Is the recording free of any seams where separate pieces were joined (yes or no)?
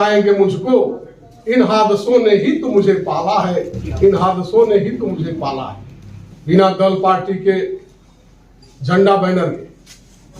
yes